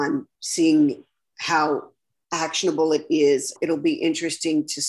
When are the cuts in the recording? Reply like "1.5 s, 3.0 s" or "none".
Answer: 3.5 s